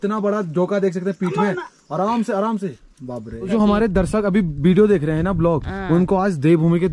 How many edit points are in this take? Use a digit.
1